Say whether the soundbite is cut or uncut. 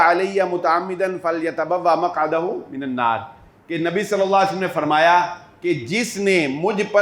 uncut